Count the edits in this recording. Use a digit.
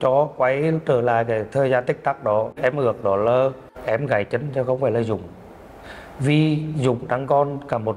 2